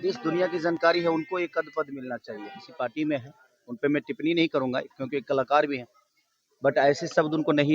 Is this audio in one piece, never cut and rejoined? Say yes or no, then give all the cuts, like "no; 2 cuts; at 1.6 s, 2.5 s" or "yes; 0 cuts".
no; 1 cut; at 2.6 s